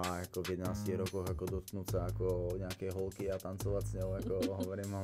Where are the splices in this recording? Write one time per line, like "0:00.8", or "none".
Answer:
none

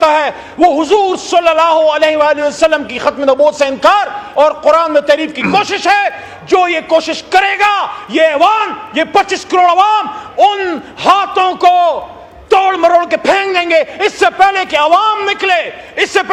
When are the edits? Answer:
none

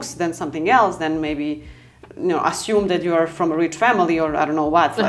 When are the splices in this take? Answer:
none

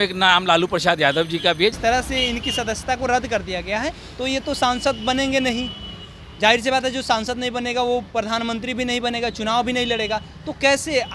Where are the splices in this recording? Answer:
0:01.8

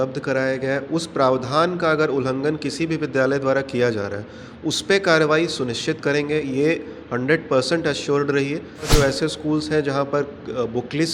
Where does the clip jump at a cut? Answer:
0:08.9

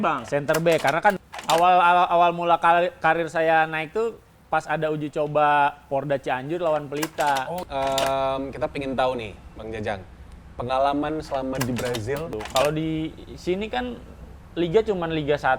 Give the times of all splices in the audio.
0:01.2
0:07.6
0:12.3

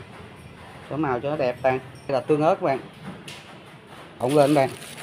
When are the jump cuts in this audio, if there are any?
0:02.1
0:04.2

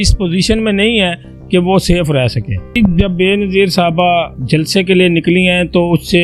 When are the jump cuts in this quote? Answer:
0:02.7
0:04.4

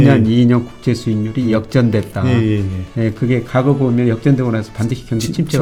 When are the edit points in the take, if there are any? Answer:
none

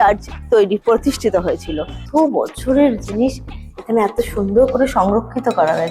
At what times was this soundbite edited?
0:01.9

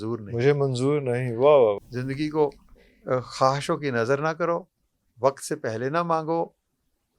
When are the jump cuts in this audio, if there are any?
0:01.8

